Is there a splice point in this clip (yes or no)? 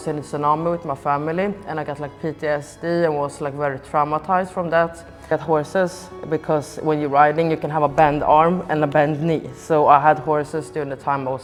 no